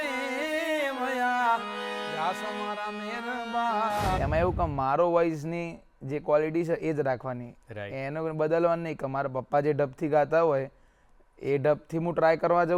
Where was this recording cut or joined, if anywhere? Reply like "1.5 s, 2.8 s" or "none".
4.2 s